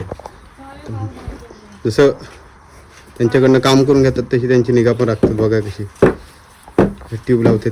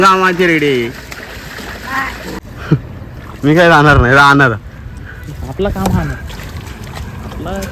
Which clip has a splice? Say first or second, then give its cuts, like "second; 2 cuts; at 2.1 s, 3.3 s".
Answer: second; 1 cut; at 2.4 s